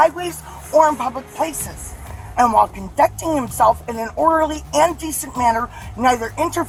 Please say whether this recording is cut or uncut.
uncut